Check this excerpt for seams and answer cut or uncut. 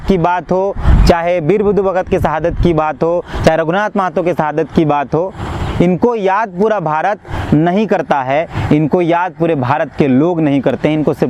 uncut